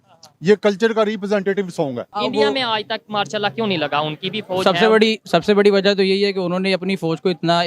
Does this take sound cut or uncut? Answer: cut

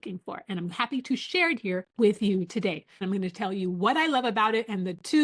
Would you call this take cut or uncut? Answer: cut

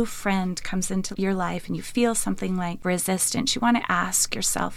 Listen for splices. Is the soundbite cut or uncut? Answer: uncut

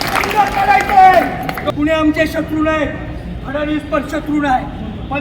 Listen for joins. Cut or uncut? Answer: cut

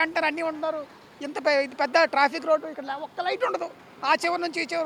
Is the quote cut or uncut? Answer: uncut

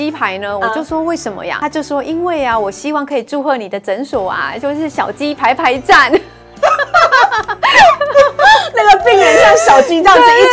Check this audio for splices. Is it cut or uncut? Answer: cut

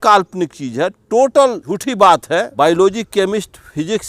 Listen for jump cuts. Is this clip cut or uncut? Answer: cut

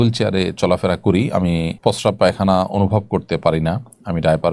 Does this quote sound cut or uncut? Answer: cut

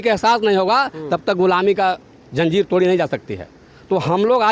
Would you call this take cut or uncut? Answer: uncut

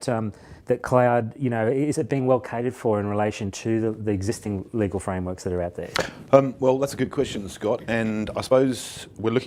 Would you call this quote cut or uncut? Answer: uncut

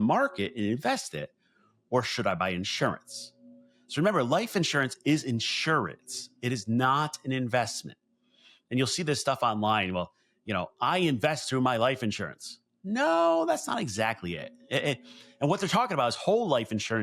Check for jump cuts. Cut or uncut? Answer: uncut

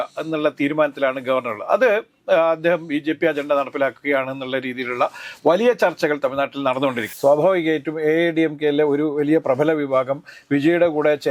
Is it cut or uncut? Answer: cut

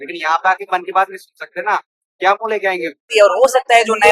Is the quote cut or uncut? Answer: cut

